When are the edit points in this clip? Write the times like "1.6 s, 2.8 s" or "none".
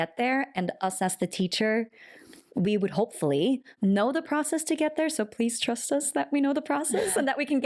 none

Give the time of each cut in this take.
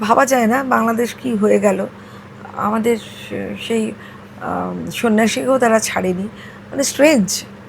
none

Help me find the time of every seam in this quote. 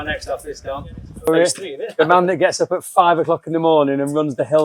1.3 s

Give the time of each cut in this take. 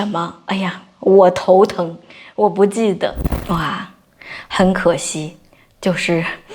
3.3 s

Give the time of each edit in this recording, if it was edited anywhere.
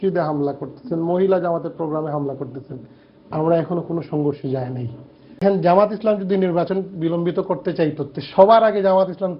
5.4 s

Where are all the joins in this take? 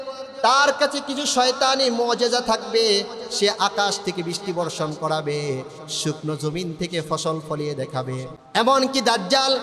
8.4 s

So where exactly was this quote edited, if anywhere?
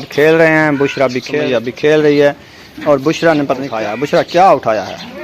1.3 s, 3.7 s

